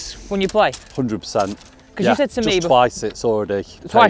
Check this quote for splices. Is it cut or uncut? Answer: uncut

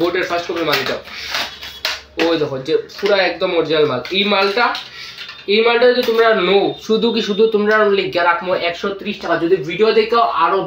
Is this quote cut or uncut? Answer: uncut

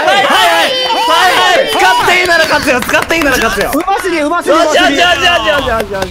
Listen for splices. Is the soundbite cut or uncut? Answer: uncut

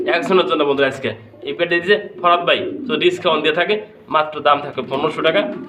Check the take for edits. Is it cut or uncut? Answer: uncut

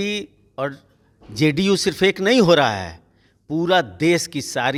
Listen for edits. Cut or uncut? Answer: uncut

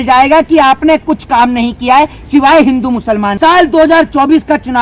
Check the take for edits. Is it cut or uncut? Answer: cut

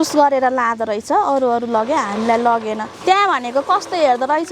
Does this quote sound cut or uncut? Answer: cut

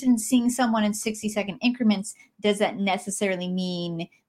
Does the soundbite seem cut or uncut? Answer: uncut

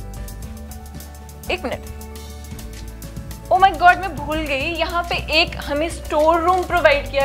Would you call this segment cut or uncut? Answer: uncut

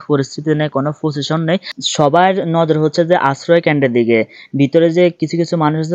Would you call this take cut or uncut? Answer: cut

